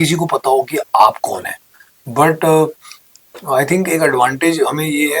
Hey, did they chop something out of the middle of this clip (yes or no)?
no